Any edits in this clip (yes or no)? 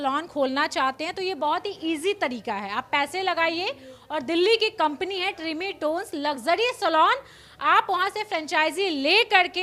no